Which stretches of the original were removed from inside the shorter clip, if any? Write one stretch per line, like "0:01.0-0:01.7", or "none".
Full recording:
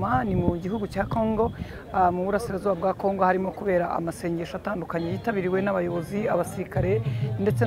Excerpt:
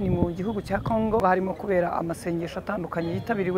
0:01.5-0:03.2